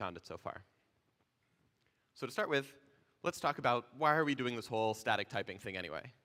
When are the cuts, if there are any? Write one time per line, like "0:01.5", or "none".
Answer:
none